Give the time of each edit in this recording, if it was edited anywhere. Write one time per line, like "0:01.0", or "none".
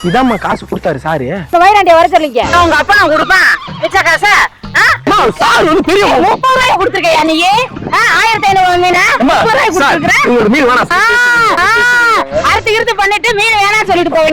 0:01.5
0:02.5
0:10.9

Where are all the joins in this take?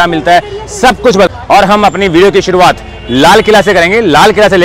0:01.3

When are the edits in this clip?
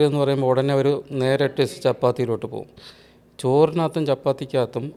none

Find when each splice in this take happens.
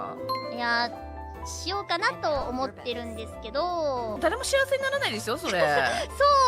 0:04.1

